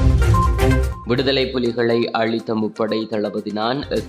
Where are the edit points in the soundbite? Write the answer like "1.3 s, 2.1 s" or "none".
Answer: 0.9 s